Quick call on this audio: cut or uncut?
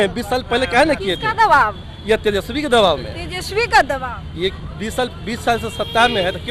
uncut